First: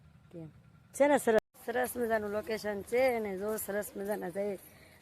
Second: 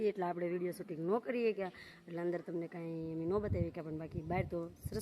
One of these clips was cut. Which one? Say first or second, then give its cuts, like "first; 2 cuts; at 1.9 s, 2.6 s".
first; 1 cut; at 1.4 s